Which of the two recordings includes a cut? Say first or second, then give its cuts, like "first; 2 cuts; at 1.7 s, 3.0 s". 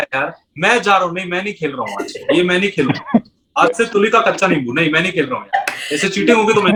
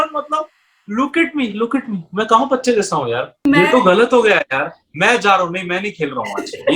second; 1 cut; at 3.4 s